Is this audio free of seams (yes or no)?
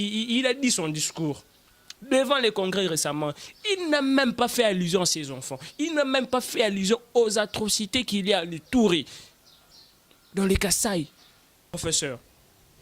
no